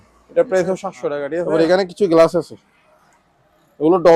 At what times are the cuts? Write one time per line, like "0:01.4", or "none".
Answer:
0:01.4